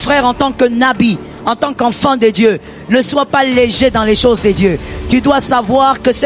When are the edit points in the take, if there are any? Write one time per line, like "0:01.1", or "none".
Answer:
none